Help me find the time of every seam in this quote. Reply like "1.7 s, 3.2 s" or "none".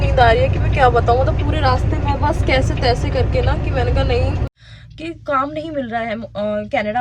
4.5 s